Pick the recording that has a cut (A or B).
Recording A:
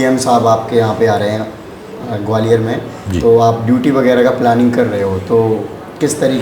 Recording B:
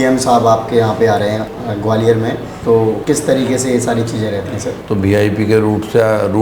B